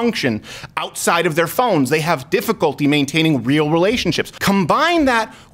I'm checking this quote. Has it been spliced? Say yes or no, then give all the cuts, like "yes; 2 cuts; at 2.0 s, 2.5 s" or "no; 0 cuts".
yes; 1 cut; at 4.3 s